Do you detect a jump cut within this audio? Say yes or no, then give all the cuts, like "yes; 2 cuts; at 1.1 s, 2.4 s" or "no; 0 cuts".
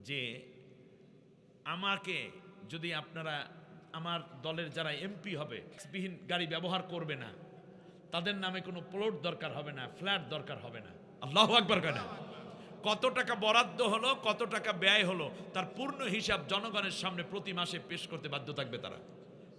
yes; 1 cut; at 5.8 s